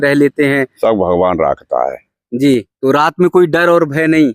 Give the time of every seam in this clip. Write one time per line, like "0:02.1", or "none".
0:02.7

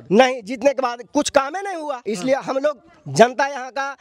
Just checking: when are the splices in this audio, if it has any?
0:02.0

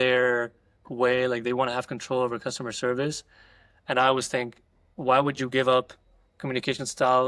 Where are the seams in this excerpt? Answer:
none

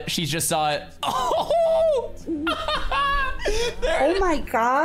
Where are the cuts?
0:02.6

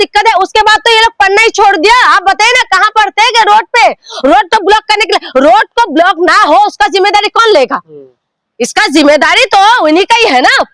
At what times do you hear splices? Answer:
none

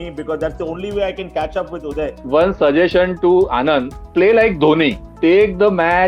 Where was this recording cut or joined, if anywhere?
0:02.2
0:04.0
0:05.0

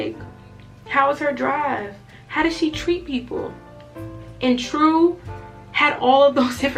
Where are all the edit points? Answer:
none

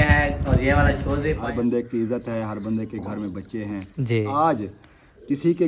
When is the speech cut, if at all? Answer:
0:01.4
0:04.3

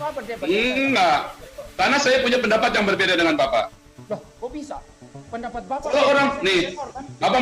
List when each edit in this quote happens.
0:03.9

